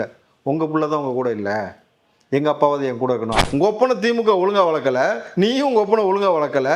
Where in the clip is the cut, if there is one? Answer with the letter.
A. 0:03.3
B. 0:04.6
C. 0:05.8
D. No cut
A